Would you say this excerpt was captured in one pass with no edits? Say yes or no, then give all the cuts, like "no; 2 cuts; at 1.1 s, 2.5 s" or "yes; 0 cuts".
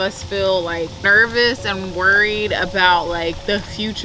no; 1 cut; at 1.0 s